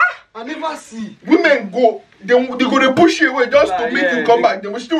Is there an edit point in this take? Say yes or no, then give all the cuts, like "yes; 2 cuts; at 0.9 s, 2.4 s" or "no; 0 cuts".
no; 0 cuts